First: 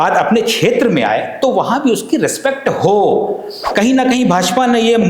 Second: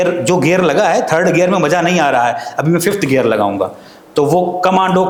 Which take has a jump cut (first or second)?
first